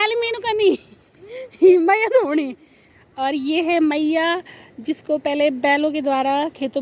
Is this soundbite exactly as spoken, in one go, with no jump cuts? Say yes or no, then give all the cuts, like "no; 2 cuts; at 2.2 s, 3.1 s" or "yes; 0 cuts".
yes; 0 cuts